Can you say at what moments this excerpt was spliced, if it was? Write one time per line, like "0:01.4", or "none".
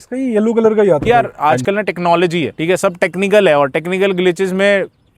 0:01.0
0:02.5

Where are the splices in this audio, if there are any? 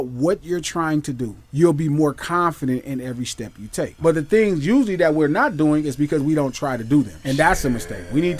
0:01.4
0:04.0
0:07.2

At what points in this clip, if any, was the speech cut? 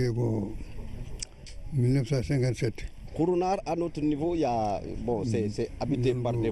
0:03.5

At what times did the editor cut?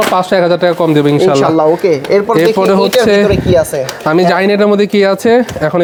none

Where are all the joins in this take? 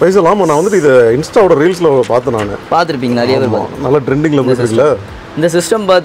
none

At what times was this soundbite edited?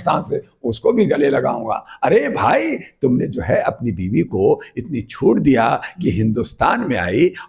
none

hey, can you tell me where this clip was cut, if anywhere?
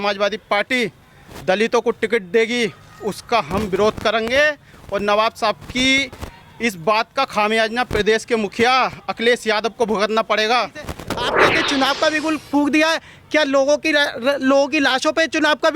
0:11.3

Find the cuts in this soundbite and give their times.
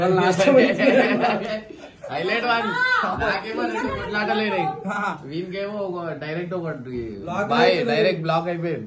none

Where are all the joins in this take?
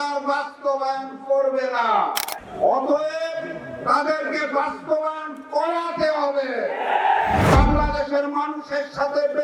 0:02.4
0:07.4

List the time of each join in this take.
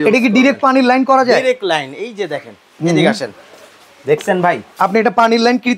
none

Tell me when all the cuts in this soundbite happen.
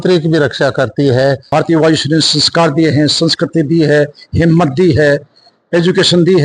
0:01.4

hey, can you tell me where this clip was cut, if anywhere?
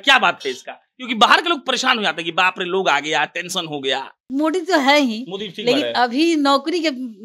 0:04.2

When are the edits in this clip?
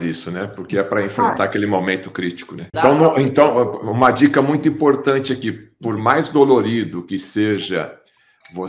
0:02.7

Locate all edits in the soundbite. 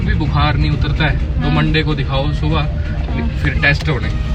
none

